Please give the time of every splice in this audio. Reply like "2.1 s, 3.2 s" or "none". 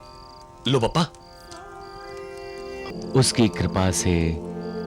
2.9 s